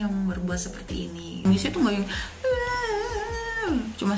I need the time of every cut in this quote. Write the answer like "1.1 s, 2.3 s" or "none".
1.4 s

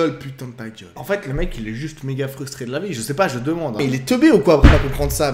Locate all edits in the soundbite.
1.0 s, 3.8 s

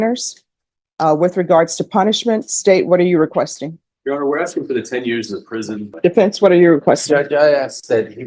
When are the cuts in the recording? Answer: 5.9 s

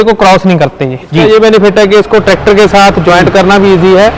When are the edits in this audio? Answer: 1.2 s

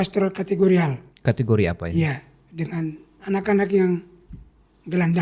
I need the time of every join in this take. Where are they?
1.1 s

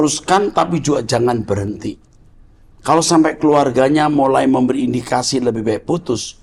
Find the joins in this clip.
none

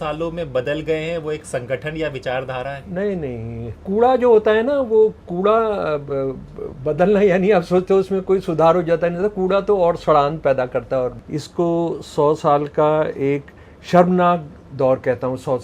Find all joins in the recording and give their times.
3.8 s, 11.2 s

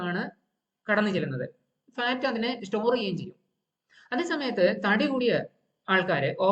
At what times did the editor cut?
none

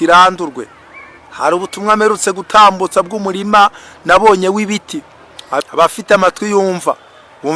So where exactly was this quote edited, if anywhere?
5.6 s

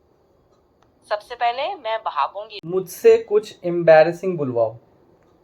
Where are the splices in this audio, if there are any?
2.5 s

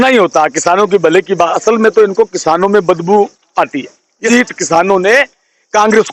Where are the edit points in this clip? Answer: 4.2 s

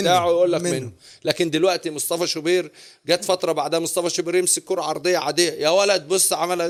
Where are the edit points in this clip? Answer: none

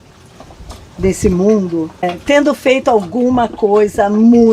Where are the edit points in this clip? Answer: 2.1 s

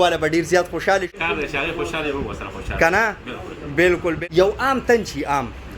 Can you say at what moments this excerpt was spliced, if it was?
1.1 s, 4.2 s

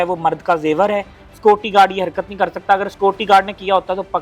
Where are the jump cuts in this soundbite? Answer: 1.1 s

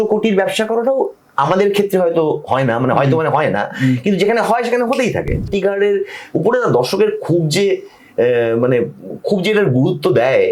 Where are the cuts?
5.5 s

